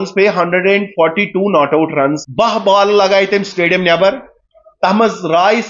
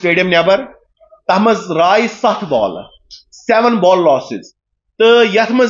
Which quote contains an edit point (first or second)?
first